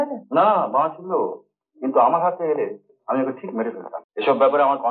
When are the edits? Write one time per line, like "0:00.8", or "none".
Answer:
0:03.9